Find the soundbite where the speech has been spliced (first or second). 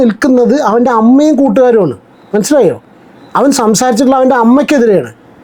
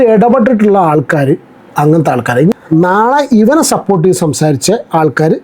second